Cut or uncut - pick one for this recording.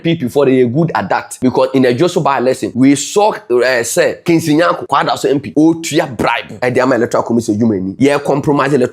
cut